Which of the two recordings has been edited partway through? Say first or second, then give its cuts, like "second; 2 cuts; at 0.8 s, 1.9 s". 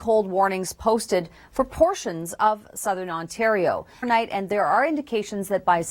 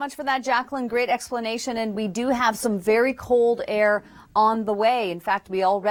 first; 1 cut; at 4.1 s